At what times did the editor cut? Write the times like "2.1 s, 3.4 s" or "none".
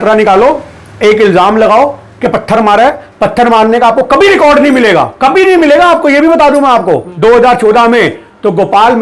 7.1 s